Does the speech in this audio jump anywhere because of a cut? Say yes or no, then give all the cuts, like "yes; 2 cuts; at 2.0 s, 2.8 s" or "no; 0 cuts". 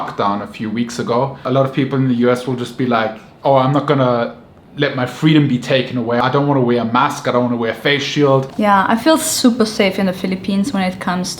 yes; 3 cuts; at 1.4 s, 6.2 s, 8.5 s